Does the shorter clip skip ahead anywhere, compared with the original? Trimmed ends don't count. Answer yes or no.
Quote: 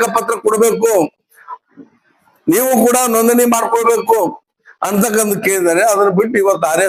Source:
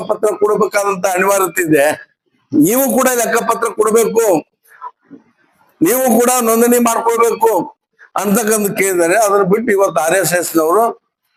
no